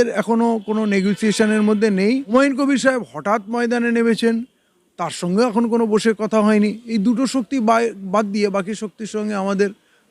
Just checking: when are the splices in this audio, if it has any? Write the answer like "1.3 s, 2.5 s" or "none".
2.3 s